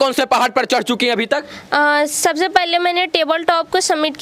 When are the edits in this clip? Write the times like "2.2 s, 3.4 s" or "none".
none